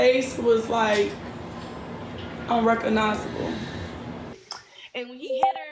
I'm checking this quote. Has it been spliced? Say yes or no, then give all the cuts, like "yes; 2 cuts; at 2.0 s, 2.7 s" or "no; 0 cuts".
yes; 1 cut; at 4.3 s